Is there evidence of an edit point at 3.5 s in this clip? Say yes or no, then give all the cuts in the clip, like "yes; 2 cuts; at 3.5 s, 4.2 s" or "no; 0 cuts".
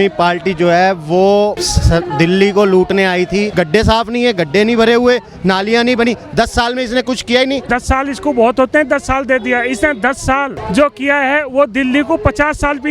yes; 4 cuts; at 1.7 s, 3.5 s, 7.7 s, 10.6 s